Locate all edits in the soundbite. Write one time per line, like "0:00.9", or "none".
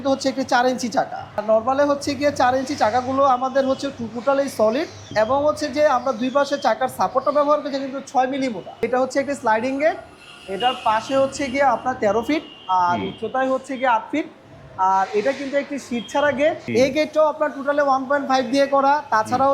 0:01.4
0:05.0
0:08.8
0:16.6

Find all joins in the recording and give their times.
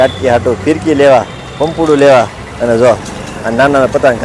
none

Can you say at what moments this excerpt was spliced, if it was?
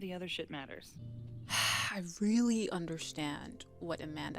0:01.0

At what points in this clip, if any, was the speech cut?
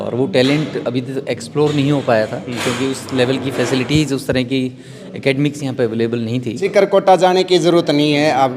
0:06.6

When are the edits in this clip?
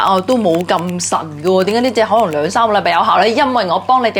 none

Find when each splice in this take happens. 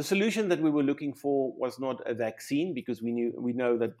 none

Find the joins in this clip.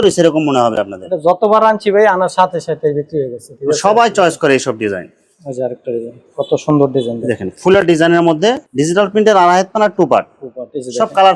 none

